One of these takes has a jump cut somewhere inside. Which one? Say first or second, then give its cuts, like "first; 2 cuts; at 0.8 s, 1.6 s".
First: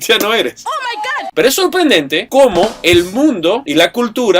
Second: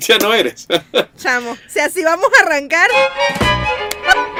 first; 1 cut; at 1.1 s